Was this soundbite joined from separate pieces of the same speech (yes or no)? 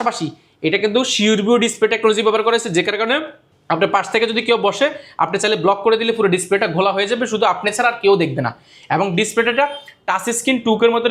no